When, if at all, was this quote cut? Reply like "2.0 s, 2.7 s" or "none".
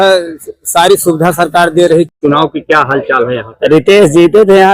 2.1 s